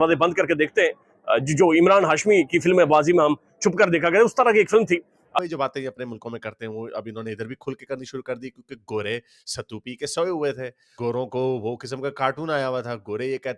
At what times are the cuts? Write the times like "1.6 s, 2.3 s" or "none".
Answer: 5.3 s